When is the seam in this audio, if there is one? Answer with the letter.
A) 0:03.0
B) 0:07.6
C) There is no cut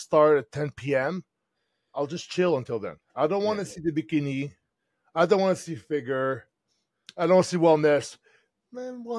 A